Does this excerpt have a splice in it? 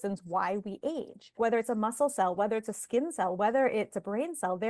yes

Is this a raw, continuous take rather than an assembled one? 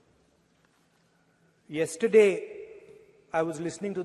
yes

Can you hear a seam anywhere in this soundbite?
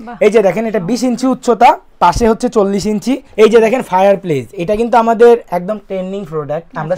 yes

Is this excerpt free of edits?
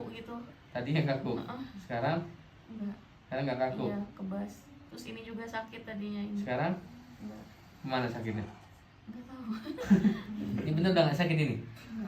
yes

